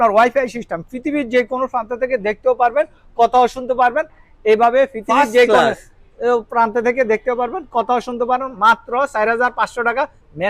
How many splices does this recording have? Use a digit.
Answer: 1